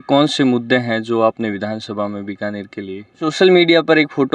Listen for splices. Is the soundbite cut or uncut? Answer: cut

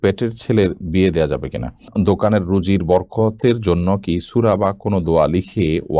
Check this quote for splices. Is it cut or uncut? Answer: cut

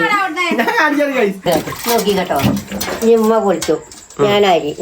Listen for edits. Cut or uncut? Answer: cut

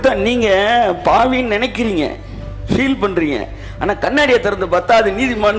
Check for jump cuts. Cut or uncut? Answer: uncut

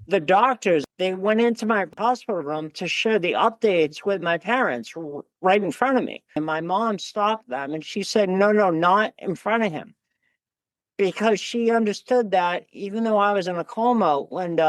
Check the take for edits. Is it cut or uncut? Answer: cut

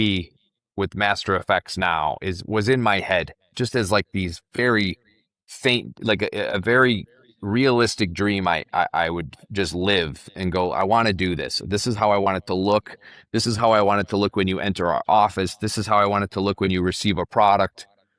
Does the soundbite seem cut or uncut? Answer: uncut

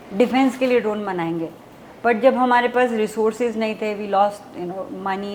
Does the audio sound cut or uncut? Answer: uncut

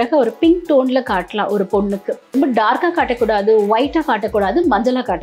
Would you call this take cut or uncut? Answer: cut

